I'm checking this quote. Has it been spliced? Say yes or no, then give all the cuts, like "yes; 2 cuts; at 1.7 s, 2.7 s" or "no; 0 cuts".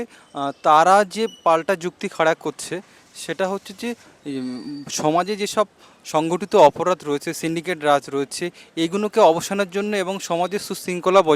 no; 0 cuts